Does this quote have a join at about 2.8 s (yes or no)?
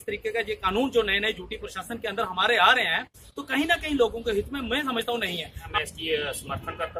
no